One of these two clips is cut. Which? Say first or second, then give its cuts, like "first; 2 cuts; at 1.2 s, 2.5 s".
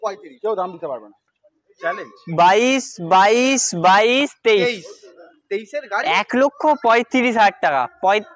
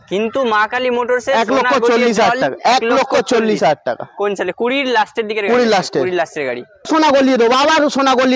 second; 1 cut; at 6.9 s